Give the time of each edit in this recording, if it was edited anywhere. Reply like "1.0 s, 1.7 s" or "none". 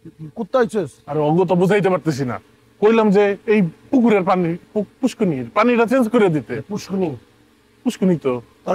none